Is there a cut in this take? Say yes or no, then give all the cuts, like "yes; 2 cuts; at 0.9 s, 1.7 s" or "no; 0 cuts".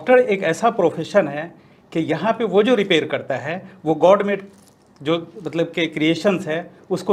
no; 0 cuts